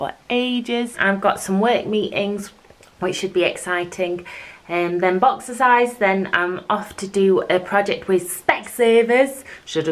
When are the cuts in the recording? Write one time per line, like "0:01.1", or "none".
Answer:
0:00.9